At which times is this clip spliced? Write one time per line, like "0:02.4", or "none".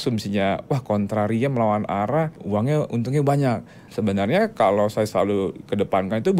0:02.4
0:03.8